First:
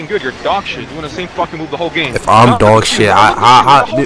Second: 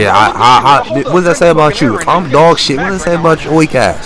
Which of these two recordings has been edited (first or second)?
first